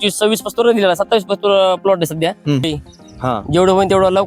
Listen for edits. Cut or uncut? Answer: cut